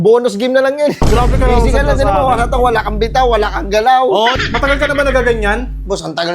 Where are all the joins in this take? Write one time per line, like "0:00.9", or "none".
0:04.4